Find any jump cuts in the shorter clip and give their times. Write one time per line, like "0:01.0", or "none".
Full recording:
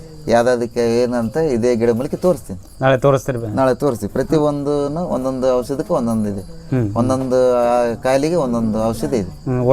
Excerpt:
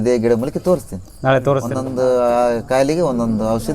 0:01.8